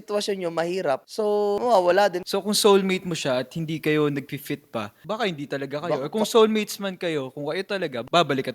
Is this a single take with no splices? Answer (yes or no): no